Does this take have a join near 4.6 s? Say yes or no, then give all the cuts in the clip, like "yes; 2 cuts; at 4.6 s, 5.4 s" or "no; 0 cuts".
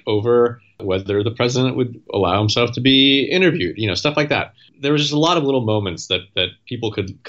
yes; 3 cuts; at 0.8 s, 2.0 s, 4.6 s